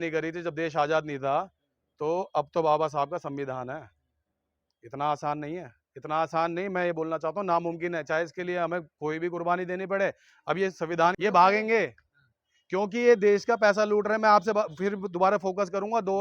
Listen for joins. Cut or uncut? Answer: cut